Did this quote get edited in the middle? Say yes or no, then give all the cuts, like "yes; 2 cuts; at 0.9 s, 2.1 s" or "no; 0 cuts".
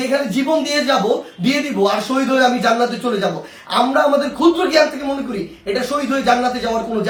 no; 0 cuts